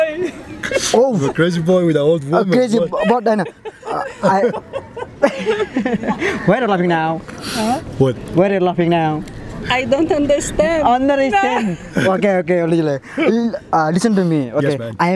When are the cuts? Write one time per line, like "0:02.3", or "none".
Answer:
none